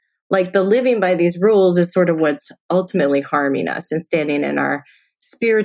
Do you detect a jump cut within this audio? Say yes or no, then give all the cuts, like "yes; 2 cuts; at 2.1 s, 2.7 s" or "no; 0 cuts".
no; 0 cuts